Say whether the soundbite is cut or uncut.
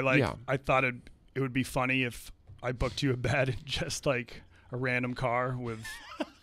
uncut